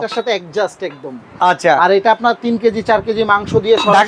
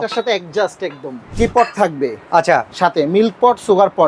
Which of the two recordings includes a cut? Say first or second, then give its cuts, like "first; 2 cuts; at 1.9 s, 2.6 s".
second; 1 cut; at 1.2 s